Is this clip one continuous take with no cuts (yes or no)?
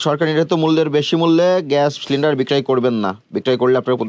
yes